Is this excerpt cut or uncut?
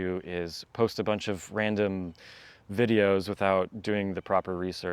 uncut